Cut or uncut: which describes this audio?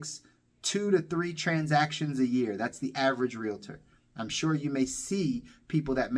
uncut